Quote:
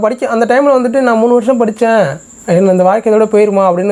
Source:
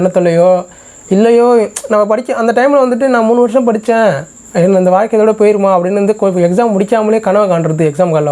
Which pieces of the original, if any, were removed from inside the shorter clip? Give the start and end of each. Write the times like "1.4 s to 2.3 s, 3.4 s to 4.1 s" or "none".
none